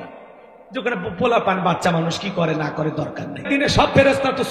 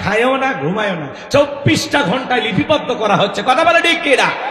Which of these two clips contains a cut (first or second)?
first